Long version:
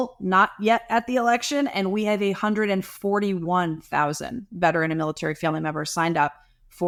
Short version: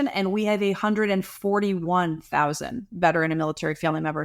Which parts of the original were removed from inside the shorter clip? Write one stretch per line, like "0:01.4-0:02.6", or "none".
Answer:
none